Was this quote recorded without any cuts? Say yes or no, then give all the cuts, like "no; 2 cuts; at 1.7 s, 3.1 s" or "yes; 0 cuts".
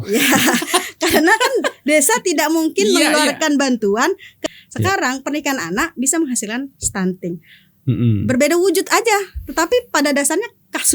no; 1 cut; at 4.4 s